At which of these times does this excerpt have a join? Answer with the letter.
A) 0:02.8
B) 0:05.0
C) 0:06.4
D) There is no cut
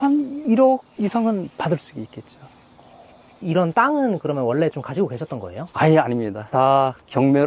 C